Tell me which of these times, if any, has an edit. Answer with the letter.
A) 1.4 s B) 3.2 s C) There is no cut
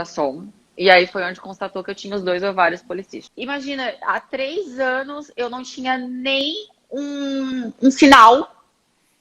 B